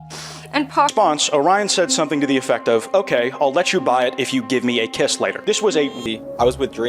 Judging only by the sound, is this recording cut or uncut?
cut